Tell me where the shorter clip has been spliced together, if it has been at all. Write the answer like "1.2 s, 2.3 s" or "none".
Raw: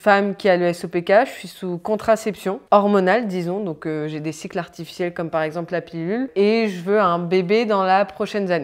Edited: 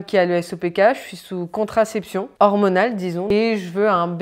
3.3 s